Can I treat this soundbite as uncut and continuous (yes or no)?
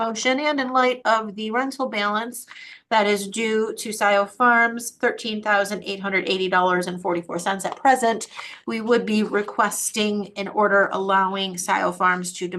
yes